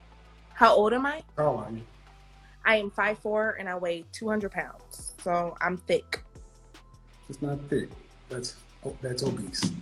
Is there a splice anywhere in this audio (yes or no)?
no